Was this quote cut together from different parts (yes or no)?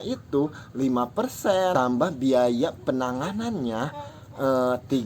yes